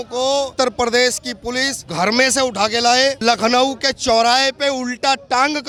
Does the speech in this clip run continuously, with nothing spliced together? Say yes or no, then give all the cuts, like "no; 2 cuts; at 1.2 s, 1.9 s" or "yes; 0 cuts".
yes; 0 cuts